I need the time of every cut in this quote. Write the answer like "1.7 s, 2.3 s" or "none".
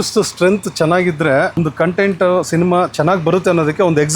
1.5 s